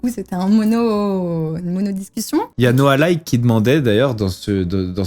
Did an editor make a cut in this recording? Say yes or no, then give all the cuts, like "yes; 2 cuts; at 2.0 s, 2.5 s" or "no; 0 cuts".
yes; 1 cut; at 2.5 s